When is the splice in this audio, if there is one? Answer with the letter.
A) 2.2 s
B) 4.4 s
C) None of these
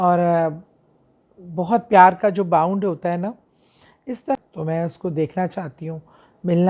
B